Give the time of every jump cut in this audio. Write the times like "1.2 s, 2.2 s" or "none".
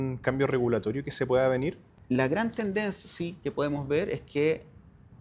1.8 s